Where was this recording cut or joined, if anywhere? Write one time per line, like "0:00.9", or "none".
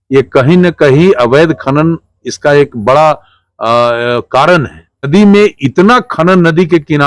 0:05.1